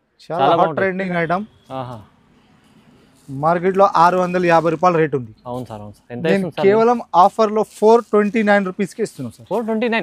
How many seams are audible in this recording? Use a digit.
1